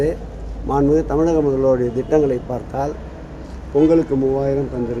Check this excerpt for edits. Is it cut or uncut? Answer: uncut